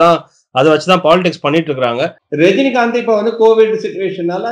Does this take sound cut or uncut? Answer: cut